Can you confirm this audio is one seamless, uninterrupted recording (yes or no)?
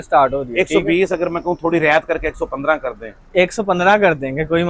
yes